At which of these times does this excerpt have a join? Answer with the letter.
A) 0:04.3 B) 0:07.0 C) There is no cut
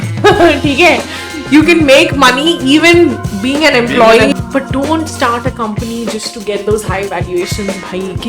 A